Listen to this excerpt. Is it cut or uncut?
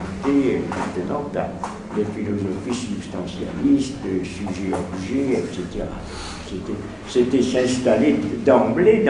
cut